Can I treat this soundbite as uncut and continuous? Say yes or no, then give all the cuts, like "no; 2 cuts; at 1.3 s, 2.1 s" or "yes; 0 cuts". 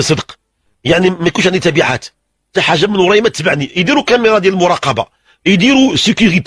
yes; 0 cuts